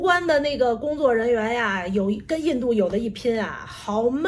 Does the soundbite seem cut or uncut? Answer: uncut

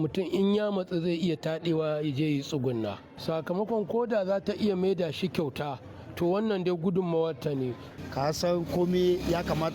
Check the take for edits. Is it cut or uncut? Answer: uncut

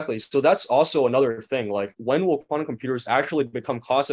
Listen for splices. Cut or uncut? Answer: cut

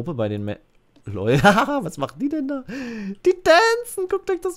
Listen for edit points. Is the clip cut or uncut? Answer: uncut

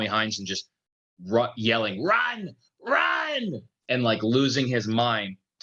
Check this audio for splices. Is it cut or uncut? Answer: uncut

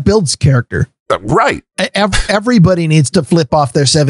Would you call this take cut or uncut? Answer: uncut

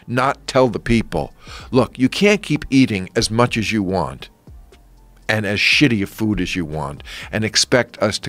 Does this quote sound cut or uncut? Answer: uncut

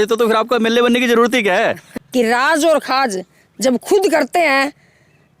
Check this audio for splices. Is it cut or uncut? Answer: cut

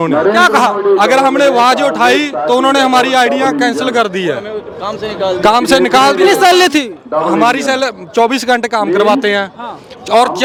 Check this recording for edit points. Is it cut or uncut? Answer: uncut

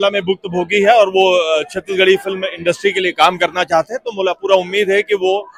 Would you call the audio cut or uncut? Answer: uncut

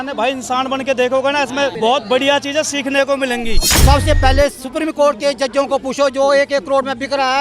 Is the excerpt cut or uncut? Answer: cut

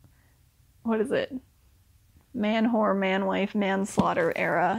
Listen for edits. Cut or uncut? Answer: uncut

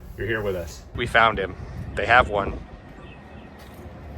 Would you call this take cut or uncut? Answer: cut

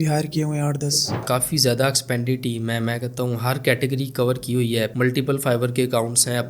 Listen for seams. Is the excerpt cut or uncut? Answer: cut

